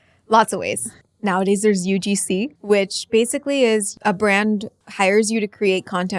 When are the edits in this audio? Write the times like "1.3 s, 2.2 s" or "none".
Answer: 0.9 s, 2.5 s, 3.9 s, 4.8 s